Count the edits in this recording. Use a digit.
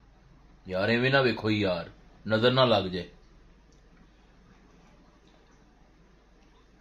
0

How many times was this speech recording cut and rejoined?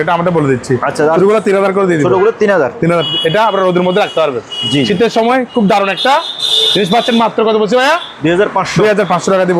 1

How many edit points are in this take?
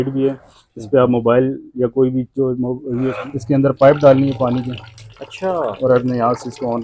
1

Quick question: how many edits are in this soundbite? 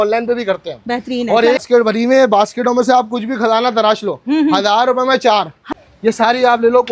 2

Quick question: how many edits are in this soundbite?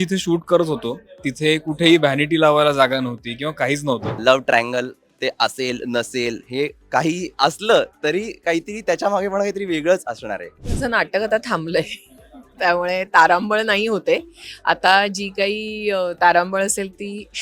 3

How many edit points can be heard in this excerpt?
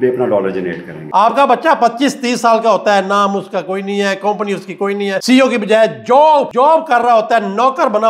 3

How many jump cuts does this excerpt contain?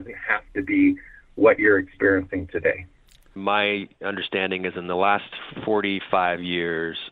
1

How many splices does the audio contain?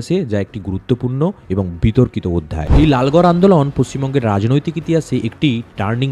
1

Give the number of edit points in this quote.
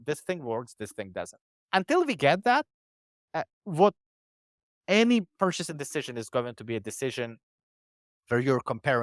0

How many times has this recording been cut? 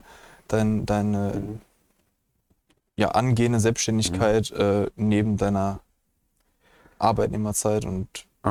0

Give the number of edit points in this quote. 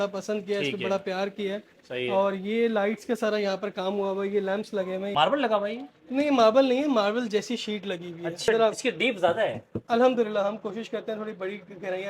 2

